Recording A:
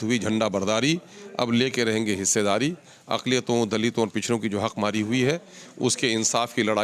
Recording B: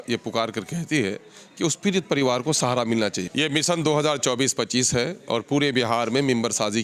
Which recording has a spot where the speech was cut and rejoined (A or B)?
B